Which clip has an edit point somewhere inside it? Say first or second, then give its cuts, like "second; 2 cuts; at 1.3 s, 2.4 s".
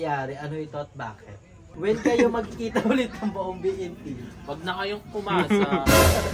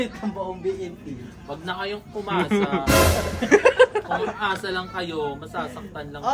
first; 1 cut; at 1.7 s